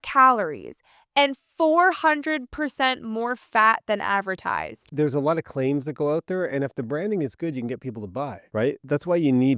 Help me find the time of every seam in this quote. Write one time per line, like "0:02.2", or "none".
0:04.8
0:08.4

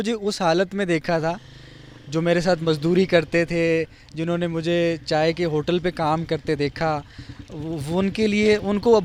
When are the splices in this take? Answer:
none

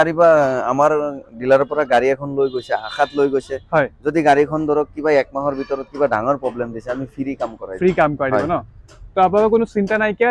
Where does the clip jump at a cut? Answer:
none

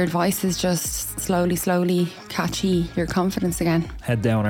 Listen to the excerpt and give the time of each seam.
none

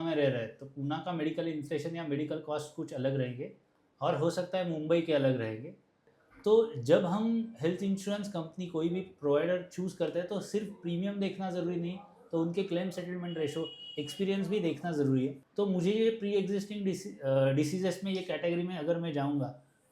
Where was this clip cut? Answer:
0:06.1
0:15.4

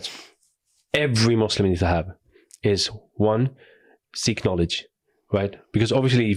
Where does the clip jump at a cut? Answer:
none

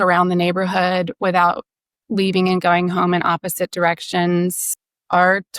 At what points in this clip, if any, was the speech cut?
0:04.7

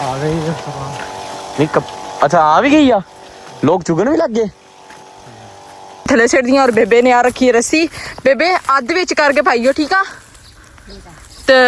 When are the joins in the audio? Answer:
0:06.1

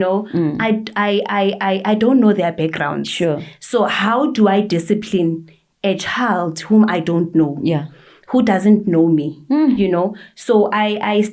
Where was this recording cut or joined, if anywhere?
none

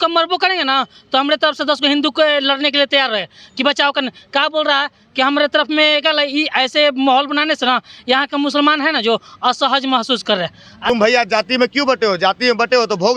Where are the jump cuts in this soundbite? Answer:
0:10.9

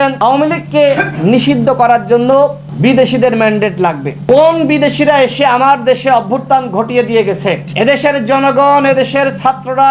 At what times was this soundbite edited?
none

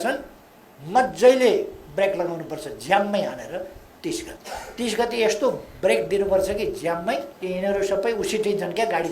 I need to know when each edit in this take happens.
0:04.4
0:07.3

